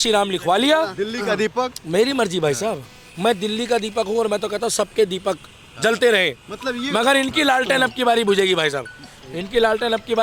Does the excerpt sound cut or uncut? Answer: uncut